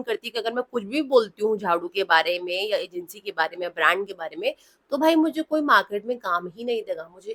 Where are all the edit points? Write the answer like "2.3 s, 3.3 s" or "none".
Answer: none